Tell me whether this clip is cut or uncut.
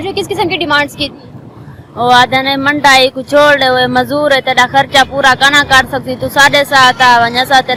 uncut